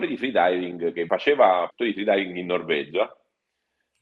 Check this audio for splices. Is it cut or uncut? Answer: cut